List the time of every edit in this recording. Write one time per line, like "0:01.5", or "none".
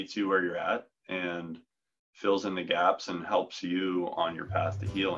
none

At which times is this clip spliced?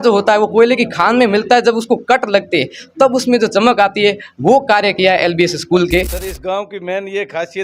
0:06.2

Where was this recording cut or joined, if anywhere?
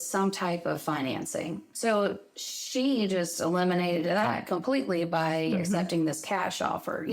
none

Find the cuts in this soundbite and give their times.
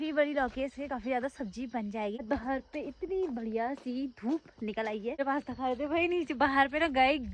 0:02.2
0:05.2

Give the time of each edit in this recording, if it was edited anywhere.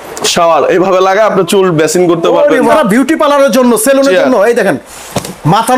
0:02.7

